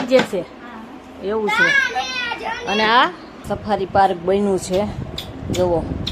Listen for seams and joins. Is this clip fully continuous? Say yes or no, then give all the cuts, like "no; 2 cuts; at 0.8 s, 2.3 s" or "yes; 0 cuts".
no; 1 cut; at 3.4 s